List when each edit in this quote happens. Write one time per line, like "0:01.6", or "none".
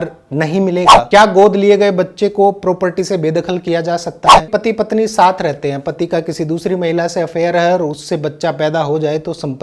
0:01.1
0:04.4